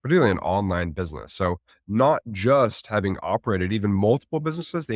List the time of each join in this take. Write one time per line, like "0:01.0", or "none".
none